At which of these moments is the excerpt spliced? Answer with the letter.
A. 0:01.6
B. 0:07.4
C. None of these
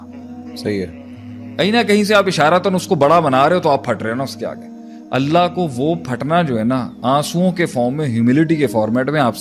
C